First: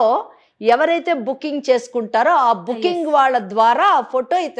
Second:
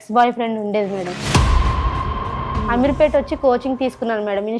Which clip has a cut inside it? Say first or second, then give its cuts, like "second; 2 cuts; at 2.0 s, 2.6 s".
second; 1 cut; at 2.4 s